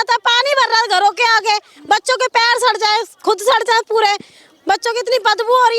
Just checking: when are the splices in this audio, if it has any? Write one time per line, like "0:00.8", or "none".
none